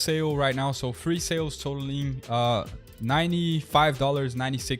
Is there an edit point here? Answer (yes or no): no